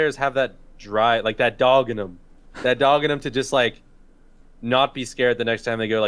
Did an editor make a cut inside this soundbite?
no; 0 cuts

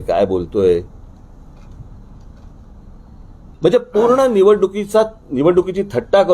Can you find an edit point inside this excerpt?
yes; 1 cut; at 3.5 s

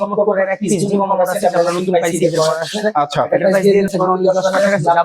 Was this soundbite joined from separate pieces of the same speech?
yes; 1 cut; at 3.9 s

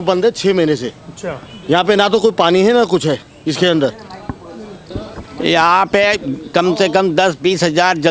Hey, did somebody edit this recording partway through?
yes; 1 cut; at 4.9 s

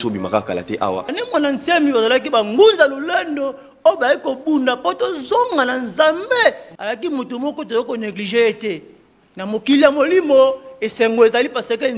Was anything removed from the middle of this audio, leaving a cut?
yes; 1 cut; at 1.2 s

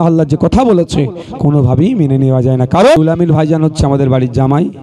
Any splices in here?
yes; 1 cut; at 3.0 s

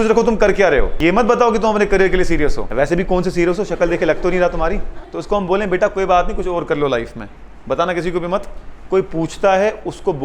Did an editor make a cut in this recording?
yes; 3 cuts; at 0.9 s, 2.6 s, 5.0 s

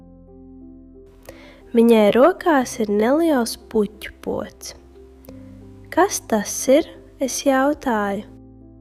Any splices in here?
no; 0 cuts

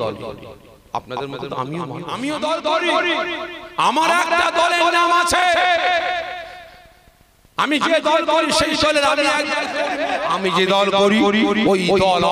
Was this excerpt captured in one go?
no; 2 cuts; at 2.1 s, 9.9 s

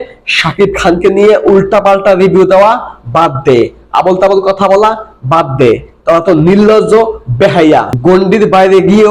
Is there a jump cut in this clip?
yes; 1 cut; at 7.9 s

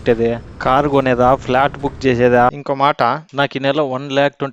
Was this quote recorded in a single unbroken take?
no; 1 cut; at 2.5 s

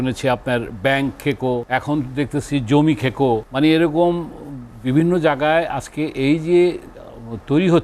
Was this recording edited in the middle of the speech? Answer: yes; 2 cuts; at 1.6 s, 3.5 s

